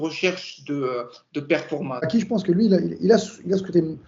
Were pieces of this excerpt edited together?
yes; 1 cut; at 2.1 s

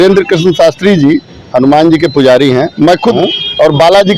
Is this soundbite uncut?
no; 1 cut; at 3.2 s

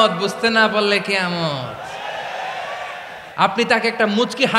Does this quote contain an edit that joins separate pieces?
yes; 1 cut; at 3.2 s

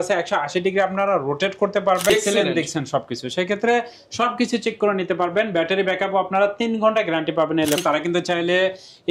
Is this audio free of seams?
no; 2 cuts; at 2.1 s, 7.8 s

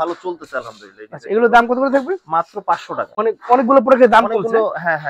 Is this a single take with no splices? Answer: no; 1 cut; at 3.1 s

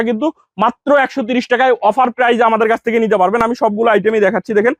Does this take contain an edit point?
no; 0 cuts

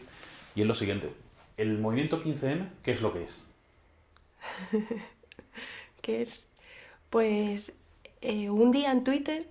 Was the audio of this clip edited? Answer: yes; 1 cut; at 1.9 s

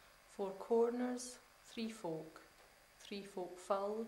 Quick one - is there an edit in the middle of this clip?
no; 0 cuts

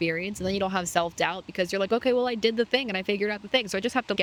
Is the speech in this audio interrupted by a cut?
no; 0 cuts

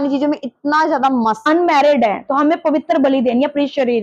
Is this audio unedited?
no; 1 cut; at 1.4 s

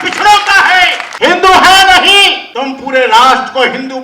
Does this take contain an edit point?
yes; 2 cuts; at 1.0 s, 2.4 s

